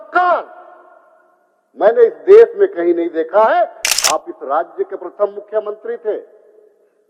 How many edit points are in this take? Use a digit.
1